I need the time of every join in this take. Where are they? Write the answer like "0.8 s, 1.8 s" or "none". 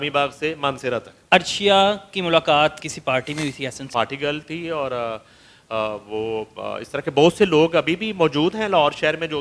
1.1 s, 2.8 s, 3.9 s